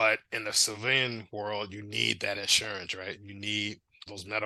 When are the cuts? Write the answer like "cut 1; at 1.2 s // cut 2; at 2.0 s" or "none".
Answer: none